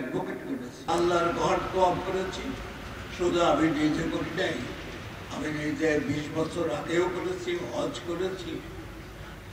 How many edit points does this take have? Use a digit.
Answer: 0